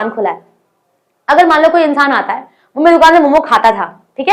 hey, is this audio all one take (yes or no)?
yes